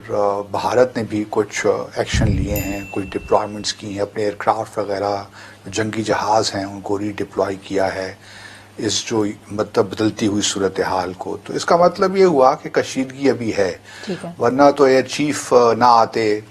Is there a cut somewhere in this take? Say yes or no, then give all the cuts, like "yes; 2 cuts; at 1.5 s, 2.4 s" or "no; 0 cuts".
no; 0 cuts